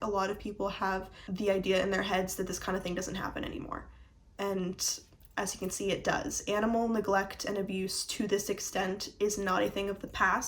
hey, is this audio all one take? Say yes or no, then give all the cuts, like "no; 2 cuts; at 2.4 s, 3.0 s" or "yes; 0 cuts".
no; 1 cut; at 1.2 s